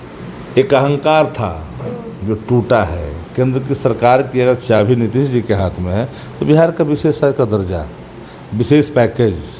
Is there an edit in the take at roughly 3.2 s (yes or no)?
yes